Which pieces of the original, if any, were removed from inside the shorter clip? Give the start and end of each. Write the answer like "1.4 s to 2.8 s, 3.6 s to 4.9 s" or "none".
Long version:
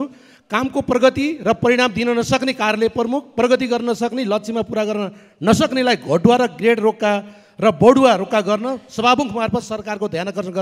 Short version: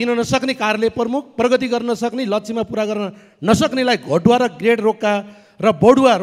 none